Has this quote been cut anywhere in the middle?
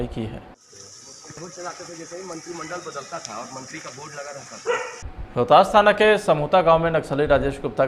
yes; 1 cut; at 5.2 s

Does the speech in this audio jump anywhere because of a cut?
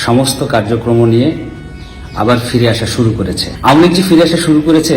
yes; 1 cut; at 3.5 s

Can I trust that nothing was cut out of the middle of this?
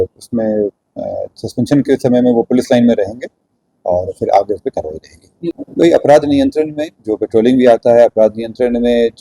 no; 1 cut; at 5.6 s

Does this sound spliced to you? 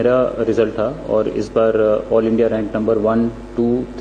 no; 0 cuts

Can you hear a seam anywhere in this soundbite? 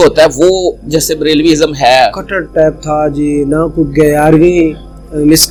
no; 0 cuts

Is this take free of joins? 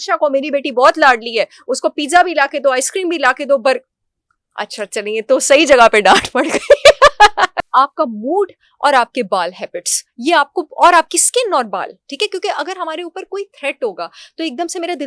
no; 1 cut; at 7.6 s

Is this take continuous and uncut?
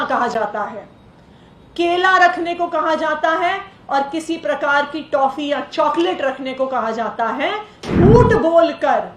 no; 1 cut; at 7.8 s

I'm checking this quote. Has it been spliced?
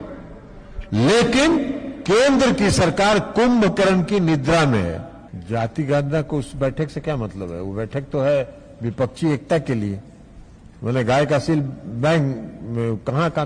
no; 0 cuts

